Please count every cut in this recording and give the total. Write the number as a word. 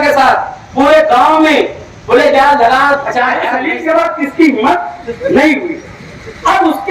one